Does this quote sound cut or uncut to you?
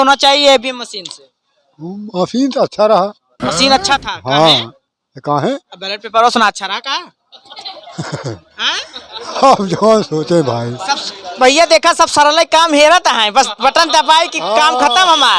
uncut